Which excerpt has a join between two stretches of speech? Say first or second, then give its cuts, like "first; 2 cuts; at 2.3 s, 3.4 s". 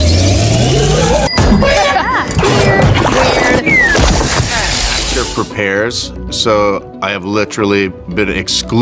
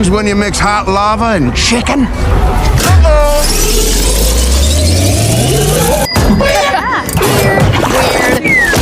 first; 1 cut; at 5.0 s